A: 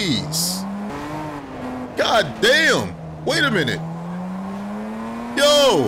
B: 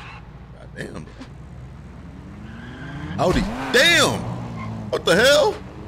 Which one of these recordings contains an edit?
A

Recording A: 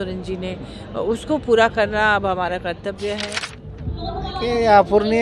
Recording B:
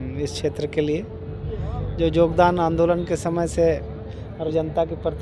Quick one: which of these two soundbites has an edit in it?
A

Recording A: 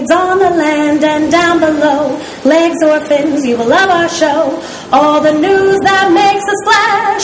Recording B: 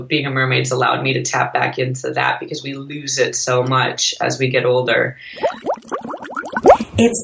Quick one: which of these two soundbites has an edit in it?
B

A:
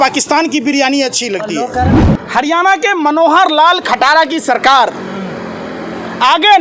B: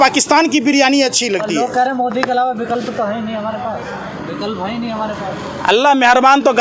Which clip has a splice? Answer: A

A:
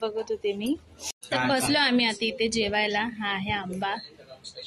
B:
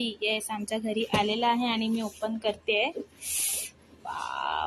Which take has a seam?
A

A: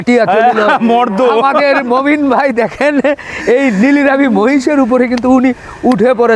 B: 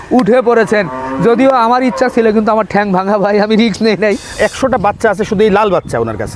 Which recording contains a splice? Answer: B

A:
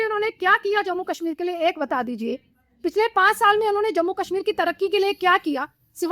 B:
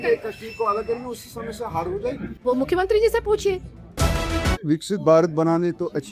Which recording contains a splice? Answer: B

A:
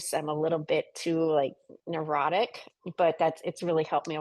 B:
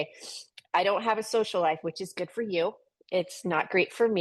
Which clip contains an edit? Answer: A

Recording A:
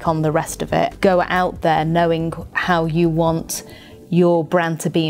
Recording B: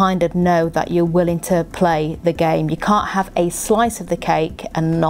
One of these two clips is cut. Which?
A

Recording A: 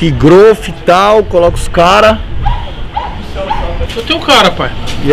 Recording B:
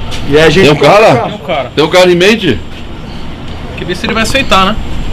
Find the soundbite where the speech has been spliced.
A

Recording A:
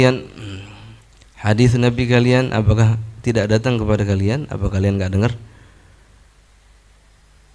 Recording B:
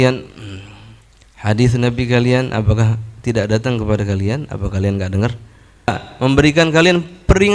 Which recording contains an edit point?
B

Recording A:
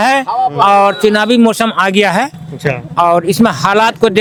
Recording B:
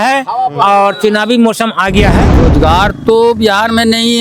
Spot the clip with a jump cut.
B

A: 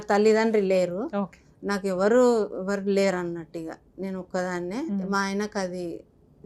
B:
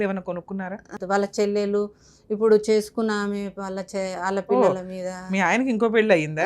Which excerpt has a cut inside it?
B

